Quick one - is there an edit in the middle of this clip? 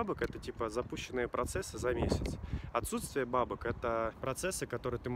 no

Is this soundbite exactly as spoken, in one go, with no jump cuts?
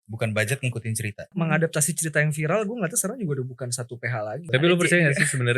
no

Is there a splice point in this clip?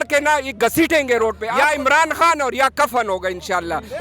yes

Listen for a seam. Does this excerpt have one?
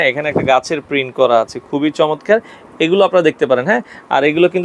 no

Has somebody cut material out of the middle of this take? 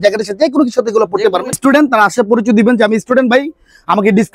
yes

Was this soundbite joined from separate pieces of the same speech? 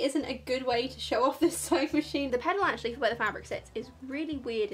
yes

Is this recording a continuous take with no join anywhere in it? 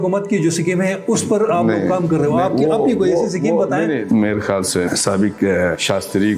no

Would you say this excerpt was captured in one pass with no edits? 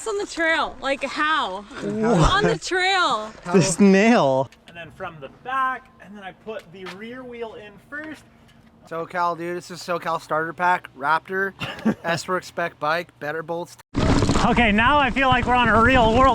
no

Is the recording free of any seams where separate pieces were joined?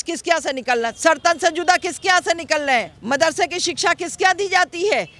no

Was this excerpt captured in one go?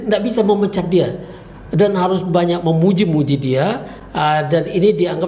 yes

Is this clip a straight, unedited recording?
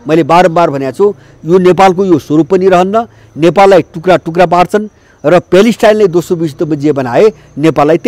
yes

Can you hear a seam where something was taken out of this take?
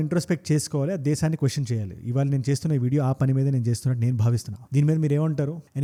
no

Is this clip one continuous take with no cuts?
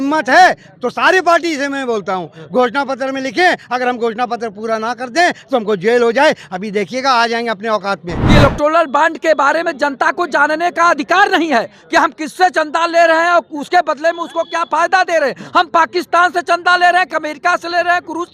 no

